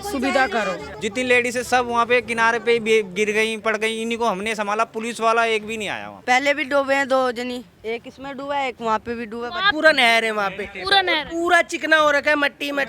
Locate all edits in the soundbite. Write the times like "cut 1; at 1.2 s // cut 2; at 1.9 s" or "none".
cut 1; at 0.9 s // cut 2; at 6.1 s // cut 3; at 9.7 s